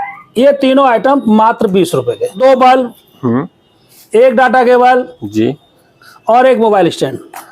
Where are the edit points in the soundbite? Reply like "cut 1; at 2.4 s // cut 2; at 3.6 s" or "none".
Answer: cut 1; at 2.4 s